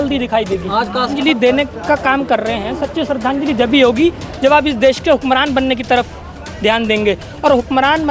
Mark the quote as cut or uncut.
cut